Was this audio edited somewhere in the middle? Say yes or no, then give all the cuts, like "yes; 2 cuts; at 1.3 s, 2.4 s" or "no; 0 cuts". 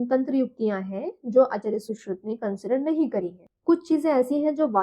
yes; 1 cut; at 3.5 s